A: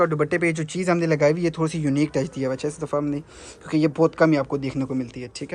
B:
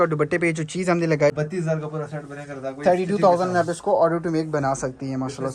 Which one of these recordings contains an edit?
B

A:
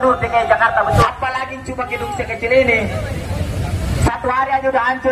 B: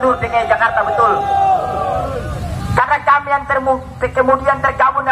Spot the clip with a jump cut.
A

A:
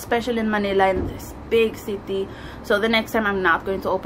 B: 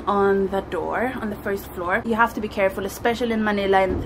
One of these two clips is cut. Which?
B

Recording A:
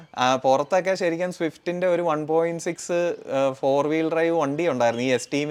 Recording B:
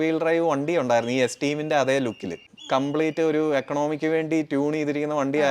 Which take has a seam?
B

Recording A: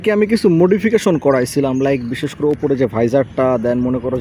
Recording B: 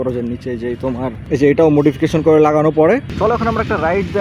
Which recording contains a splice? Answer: B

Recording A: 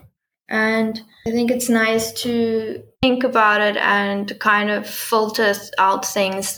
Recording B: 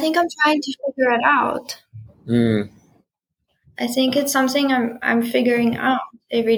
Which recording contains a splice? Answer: A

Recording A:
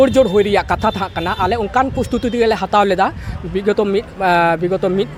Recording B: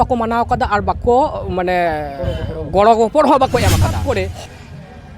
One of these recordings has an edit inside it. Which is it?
B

